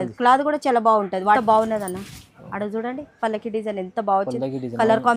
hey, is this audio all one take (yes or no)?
no